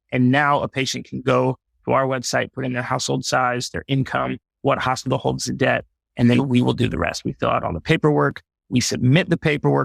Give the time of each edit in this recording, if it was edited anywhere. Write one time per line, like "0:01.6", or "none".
none